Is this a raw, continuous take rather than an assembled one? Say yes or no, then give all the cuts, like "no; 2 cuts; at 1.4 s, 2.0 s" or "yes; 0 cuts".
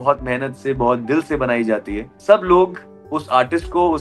no; 1 cut; at 2.1 s